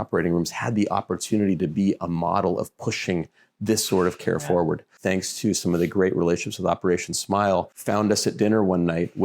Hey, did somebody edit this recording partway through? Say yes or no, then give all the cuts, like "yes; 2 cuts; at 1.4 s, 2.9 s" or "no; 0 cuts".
yes; 2 cuts; at 5.0 s, 7.8 s